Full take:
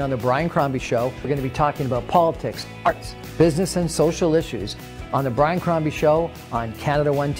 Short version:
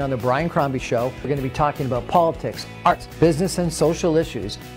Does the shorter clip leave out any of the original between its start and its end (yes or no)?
yes